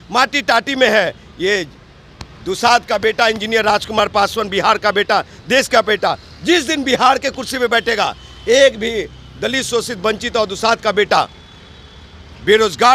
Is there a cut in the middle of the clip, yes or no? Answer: no